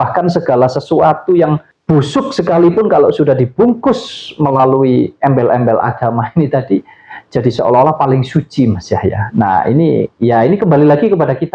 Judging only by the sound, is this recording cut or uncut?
uncut